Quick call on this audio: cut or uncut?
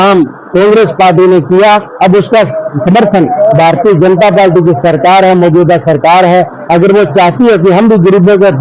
uncut